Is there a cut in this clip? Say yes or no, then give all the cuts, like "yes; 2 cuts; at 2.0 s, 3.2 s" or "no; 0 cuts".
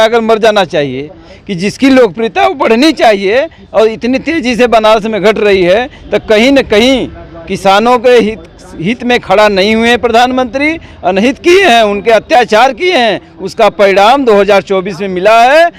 no; 0 cuts